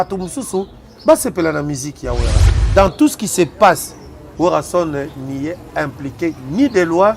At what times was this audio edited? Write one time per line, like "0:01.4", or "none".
0:02.4